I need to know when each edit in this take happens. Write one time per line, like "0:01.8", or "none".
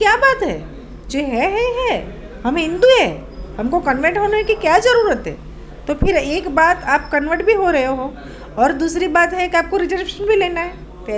none